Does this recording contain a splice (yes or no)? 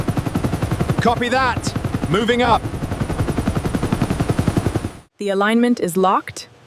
yes